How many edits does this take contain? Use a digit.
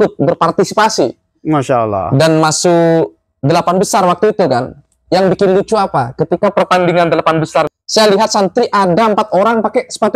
1